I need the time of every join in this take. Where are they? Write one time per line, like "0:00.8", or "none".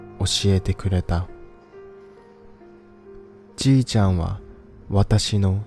0:01.2
0:03.5